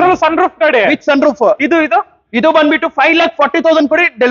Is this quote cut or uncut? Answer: uncut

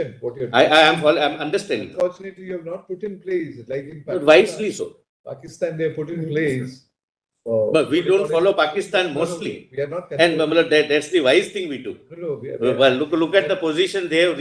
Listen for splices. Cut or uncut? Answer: uncut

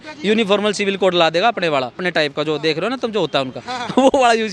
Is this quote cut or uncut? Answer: cut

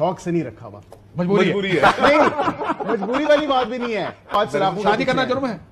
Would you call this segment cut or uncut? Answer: cut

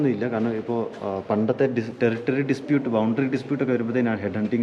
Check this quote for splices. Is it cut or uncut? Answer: uncut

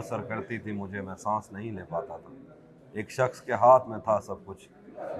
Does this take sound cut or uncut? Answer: uncut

